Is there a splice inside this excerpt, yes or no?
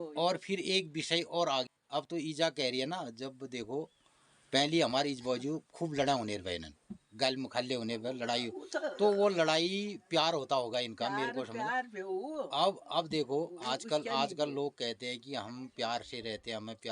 yes